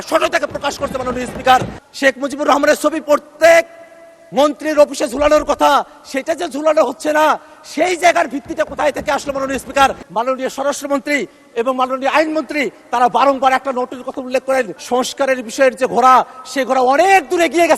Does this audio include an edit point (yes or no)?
yes